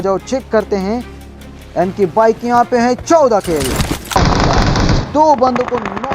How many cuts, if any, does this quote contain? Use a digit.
1